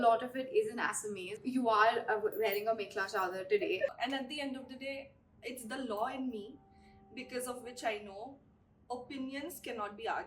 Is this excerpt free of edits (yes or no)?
no